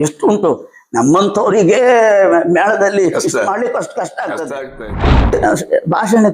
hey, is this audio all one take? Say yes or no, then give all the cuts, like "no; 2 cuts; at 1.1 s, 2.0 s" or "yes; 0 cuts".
no; 1 cut; at 5.3 s